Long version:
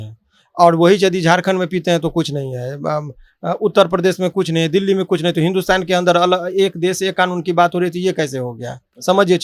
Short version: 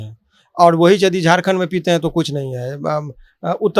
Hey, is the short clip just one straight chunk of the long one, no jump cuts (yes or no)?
yes